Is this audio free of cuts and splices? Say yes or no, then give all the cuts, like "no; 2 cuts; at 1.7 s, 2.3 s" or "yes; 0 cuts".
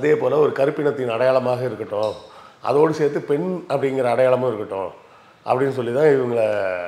yes; 0 cuts